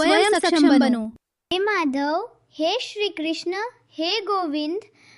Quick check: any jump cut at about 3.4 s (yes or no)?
no